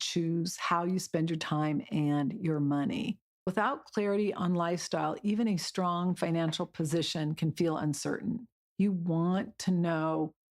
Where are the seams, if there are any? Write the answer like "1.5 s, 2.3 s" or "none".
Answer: 3.5 s

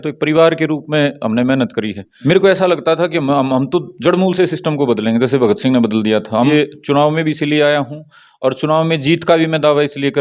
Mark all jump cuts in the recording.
2.0 s, 6.5 s

